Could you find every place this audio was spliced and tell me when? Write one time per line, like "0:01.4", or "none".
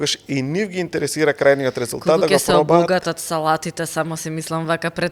none